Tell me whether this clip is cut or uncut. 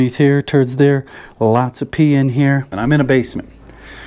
cut